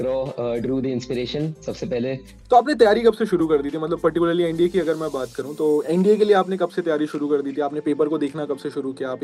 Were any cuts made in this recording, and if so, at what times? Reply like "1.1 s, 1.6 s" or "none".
2.4 s